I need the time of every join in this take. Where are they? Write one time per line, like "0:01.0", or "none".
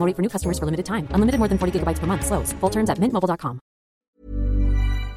0:04.1